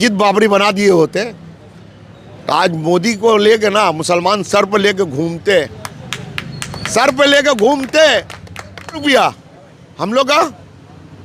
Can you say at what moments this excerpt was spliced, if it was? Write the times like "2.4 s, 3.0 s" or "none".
9.0 s